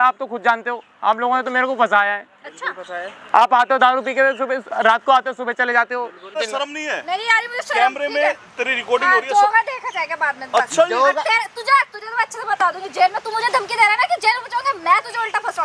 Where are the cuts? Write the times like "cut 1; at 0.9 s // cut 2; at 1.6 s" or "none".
cut 1; at 6.4 s